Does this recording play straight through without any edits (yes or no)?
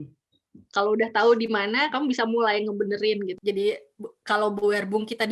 no